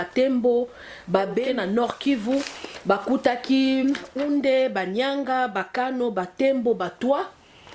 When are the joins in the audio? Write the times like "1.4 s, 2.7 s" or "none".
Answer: 1.4 s, 4.1 s